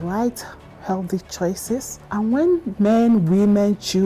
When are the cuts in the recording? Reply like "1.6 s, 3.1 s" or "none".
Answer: 2.0 s